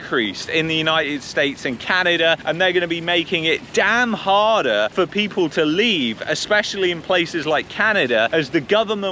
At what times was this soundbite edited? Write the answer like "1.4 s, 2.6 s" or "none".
none